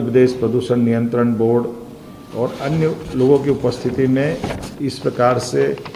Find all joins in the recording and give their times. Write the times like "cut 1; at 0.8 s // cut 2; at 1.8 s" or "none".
none